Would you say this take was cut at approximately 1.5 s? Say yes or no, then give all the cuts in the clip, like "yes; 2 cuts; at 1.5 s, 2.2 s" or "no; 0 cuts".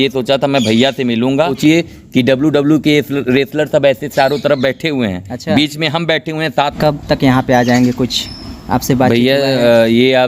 yes; 2 cuts; at 1.5 s, 6.7 s